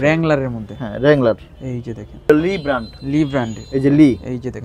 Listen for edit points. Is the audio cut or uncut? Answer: cut